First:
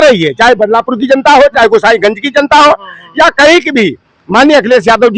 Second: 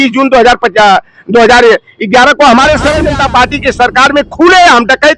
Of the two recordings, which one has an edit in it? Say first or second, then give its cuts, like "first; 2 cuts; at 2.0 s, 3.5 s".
second; 1 cut; at 3.0 s